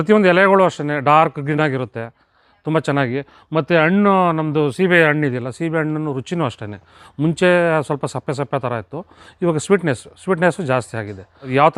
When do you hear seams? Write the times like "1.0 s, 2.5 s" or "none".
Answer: none